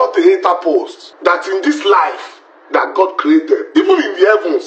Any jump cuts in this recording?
yes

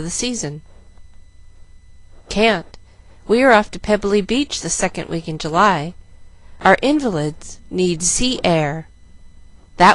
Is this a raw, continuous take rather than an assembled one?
no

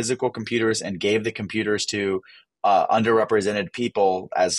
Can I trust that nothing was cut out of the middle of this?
yes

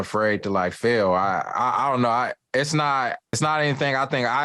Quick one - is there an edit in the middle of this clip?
yes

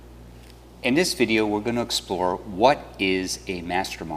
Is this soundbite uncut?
yes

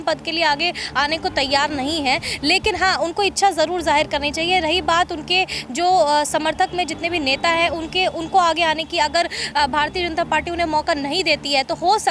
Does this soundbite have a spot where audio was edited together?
no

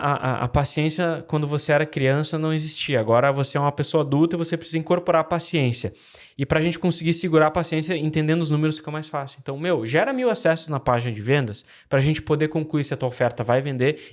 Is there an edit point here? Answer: no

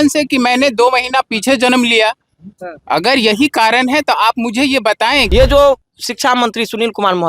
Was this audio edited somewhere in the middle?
yes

